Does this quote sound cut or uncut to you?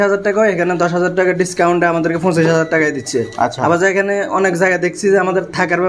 uncut